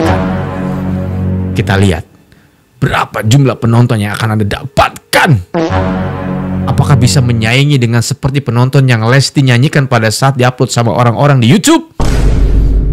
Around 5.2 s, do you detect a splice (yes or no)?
no